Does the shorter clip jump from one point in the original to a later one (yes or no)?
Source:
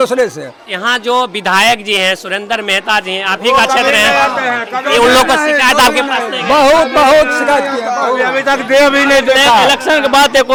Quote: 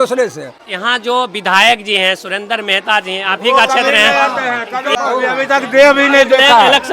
yes